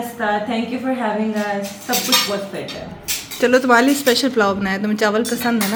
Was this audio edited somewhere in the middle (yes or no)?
no